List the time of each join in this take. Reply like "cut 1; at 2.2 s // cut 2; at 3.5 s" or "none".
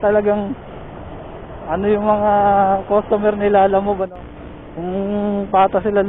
cut 1; at 4.1 s